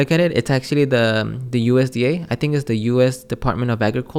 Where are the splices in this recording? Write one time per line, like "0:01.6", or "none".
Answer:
none